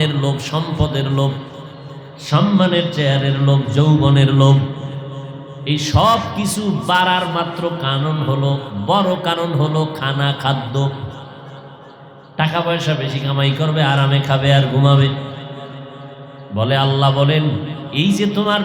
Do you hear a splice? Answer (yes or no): no